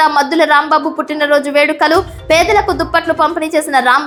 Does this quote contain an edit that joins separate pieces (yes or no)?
no